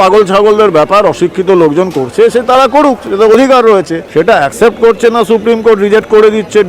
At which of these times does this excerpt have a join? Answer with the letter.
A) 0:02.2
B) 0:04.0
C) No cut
B